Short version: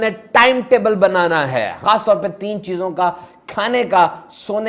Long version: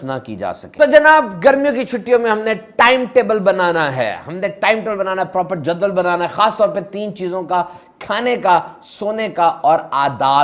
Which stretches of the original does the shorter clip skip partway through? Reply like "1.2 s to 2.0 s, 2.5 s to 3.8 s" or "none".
4.2 s to 6.3 s